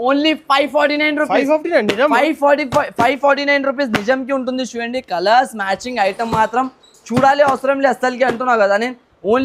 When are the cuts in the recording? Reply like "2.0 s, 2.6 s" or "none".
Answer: none